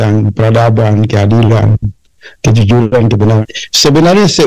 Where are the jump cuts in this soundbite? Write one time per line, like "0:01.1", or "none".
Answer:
0:03.4